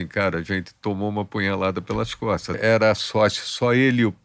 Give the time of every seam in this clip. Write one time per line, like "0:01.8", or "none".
0:02.6

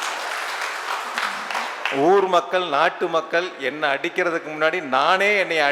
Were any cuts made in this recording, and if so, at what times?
none

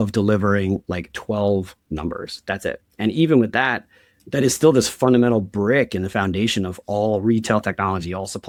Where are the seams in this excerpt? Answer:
none

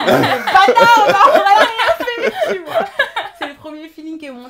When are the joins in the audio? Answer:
none

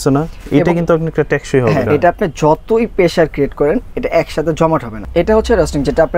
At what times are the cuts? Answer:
0:01.9
0:05.0

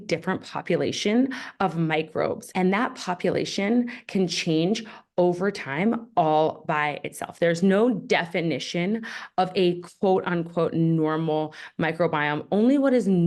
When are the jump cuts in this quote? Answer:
none

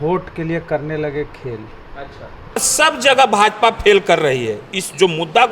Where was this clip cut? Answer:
0:02.7

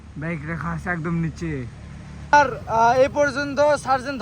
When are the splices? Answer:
0:02.3

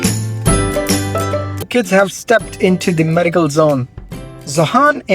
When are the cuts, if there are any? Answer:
0:01.7

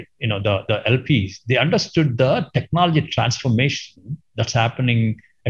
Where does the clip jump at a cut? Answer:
none

